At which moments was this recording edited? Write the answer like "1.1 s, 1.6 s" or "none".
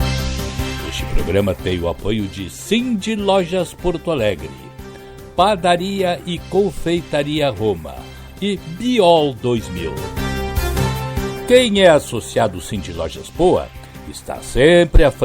1.0 s, 10.0 s, 11.4 s